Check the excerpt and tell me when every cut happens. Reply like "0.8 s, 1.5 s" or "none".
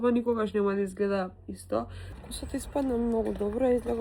2.0 s

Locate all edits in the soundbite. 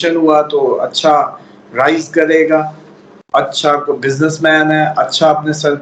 none

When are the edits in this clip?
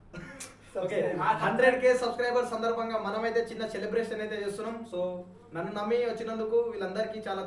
none

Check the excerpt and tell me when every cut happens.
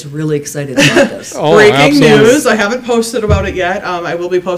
none

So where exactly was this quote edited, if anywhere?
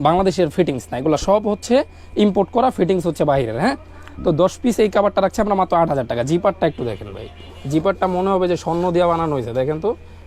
none

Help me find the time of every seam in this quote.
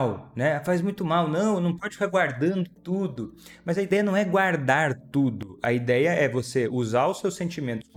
none

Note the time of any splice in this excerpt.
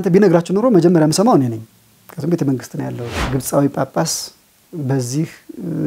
3.1 s

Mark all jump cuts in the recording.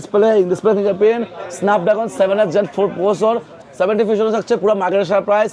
3.5 s

